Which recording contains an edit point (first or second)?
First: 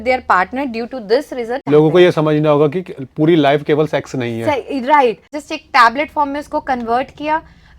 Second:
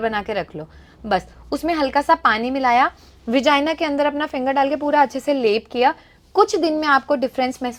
first